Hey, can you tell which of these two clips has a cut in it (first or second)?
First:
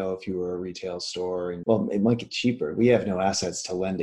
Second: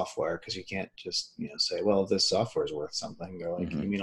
first